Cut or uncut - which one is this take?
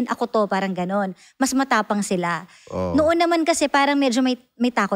uncut